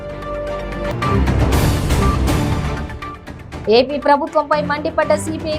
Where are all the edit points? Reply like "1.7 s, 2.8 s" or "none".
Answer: 0.9 s